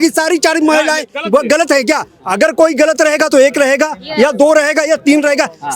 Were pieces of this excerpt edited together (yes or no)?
no